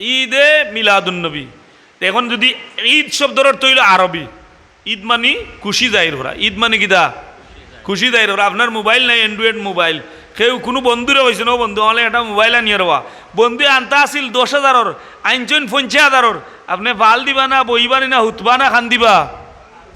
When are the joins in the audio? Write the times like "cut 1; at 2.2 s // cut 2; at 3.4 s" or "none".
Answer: none